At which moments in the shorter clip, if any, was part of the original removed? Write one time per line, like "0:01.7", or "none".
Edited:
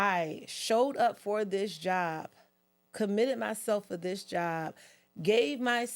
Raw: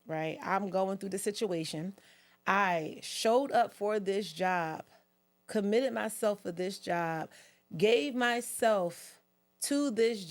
none